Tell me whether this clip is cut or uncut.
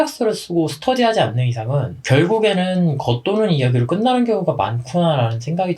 uncut